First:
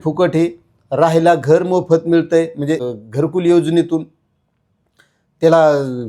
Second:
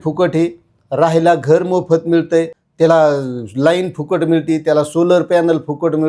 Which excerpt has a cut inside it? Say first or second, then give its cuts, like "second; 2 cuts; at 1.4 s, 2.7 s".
second; 1 cut; at 2.6 s